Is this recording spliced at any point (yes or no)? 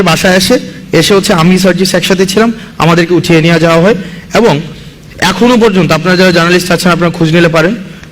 no